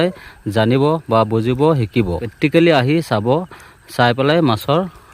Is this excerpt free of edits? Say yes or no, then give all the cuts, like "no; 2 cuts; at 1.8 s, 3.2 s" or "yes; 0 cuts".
no; 1 cut; at 2.2 s